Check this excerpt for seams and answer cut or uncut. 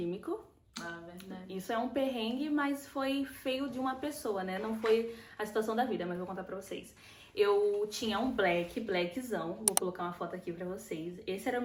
uncut